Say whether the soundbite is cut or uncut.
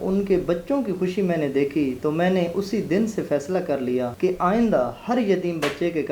cut